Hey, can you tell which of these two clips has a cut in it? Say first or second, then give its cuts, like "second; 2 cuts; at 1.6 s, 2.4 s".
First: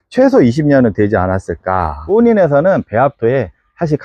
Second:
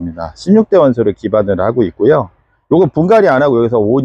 first; 1 cut; at 2.0 s